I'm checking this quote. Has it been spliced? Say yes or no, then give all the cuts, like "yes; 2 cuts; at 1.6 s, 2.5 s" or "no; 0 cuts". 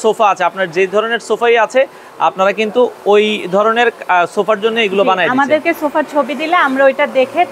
no; 0 cuts